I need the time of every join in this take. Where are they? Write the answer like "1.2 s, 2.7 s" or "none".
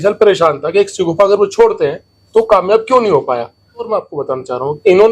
3.9 s